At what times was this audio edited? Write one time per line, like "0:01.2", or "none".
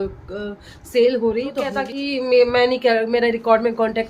0:01.9